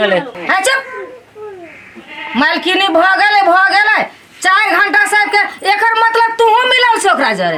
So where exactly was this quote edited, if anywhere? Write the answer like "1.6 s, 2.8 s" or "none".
none